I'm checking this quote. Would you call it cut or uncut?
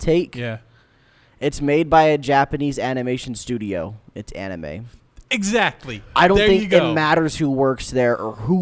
uncut